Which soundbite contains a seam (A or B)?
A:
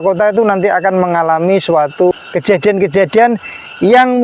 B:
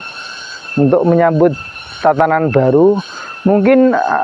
A